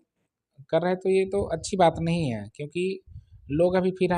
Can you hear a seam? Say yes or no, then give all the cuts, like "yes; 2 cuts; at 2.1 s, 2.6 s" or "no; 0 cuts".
no; 0 cuts